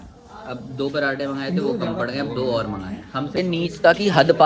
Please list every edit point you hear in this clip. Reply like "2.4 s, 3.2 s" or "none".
3.4 s